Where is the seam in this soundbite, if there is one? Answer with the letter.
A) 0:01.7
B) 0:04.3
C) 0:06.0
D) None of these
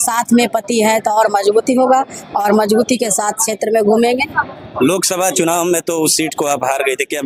D